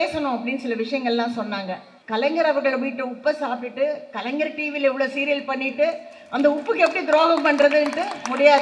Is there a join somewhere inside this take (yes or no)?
yes